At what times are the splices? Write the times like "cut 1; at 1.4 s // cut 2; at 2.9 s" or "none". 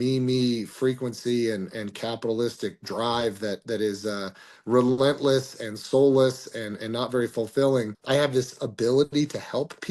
cut 1; at 8.0 s